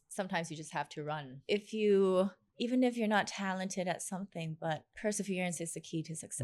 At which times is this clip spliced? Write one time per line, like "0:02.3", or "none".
0:01.4
0:02.5
0:04.9